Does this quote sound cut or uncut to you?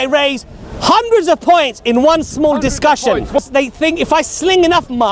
cut